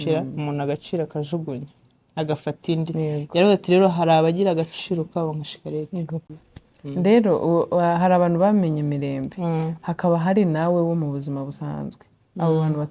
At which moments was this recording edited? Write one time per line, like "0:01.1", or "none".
0:06.3